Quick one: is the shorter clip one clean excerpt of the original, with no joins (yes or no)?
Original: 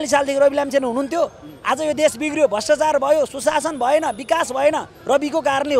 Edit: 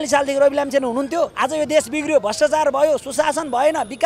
no